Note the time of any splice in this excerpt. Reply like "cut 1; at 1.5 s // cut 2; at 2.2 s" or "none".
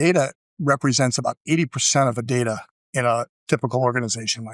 cut 1; at 2.3 s